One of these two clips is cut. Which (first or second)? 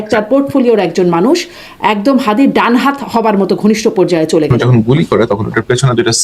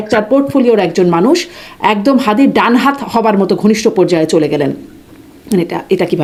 first